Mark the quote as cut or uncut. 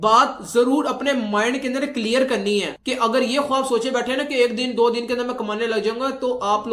uncut